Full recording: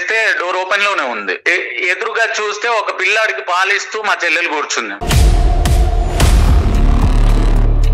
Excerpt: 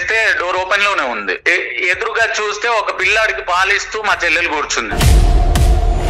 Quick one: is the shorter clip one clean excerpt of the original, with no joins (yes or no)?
no